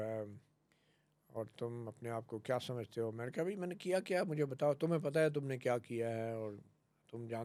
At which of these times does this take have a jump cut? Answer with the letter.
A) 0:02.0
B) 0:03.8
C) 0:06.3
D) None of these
D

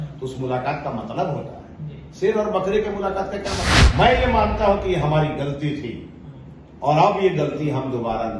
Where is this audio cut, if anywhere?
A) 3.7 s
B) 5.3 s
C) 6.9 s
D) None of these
A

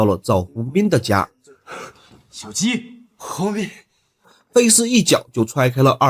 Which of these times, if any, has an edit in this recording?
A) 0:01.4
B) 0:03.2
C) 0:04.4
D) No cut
C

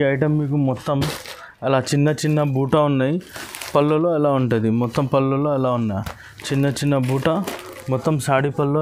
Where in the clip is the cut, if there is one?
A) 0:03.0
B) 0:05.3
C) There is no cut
C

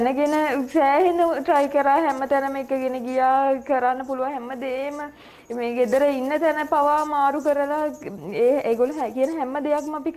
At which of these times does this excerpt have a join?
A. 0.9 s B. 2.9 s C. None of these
C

